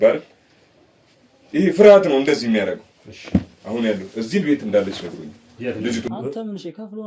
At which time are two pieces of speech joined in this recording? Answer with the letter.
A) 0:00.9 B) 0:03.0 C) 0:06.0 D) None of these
C